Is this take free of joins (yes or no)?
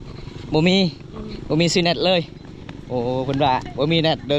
yes